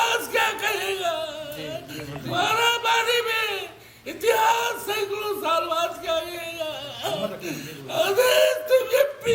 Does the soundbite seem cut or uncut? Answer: uncut